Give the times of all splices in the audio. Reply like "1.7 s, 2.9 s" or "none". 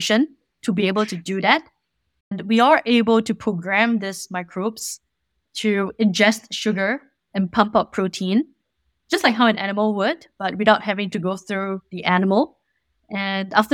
2.3 s